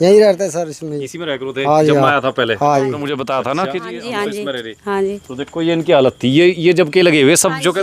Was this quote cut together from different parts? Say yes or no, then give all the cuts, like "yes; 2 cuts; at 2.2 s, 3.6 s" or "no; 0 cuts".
yes; 1 cut; at 3.0 s